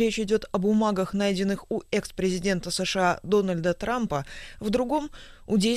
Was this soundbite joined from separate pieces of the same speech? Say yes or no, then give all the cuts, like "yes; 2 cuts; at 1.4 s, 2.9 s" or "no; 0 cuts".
no; 0 cuts